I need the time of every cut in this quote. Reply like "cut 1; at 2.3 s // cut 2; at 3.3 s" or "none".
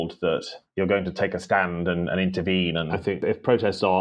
cut 1; at 2.9 s